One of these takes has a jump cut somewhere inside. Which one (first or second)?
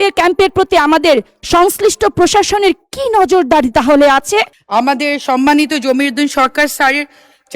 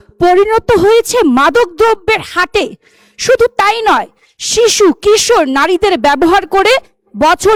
first